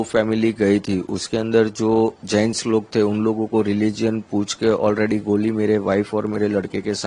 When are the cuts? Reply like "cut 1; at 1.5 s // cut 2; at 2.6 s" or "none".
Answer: none